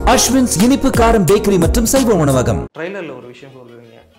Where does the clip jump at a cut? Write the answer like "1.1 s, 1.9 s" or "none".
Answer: 2.7 s